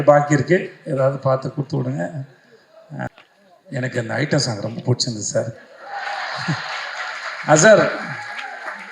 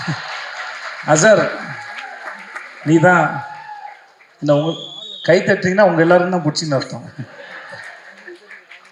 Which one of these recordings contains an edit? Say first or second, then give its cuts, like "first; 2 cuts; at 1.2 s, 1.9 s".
first; 1 cut; at 3.1 s